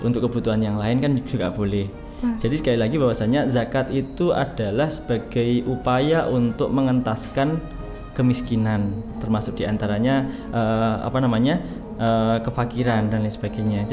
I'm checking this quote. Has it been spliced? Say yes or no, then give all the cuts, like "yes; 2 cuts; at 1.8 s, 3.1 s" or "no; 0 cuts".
no; 0 cuts